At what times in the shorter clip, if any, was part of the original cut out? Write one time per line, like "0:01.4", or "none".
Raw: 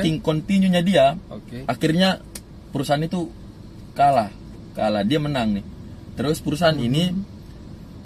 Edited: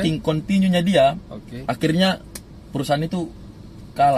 none